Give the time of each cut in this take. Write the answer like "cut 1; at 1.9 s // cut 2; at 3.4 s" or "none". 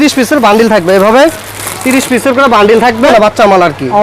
cut 1; at 3.1 s

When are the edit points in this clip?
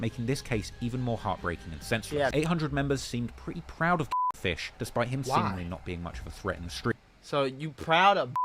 cut 1; at 2.3 s

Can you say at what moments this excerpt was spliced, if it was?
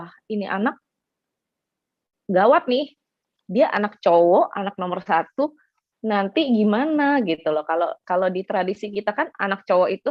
none

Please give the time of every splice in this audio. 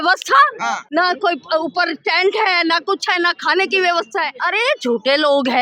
cut 1; at 0.8 s // cut 2; at 4.4 s

